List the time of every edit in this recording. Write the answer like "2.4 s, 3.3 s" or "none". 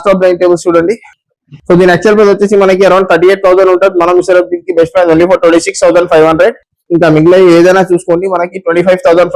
none

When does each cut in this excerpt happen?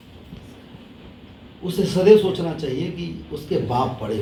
none

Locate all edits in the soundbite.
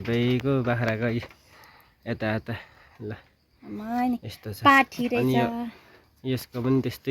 none

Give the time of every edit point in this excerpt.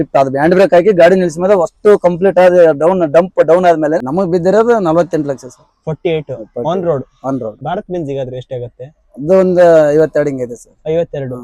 4.0 s, 7.6 s

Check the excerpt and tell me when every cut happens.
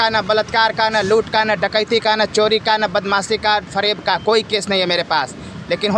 none

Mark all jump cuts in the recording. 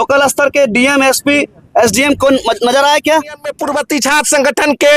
3.6 s

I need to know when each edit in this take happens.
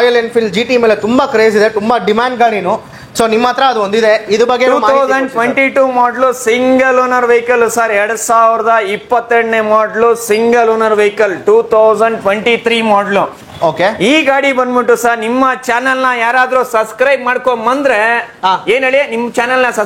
none

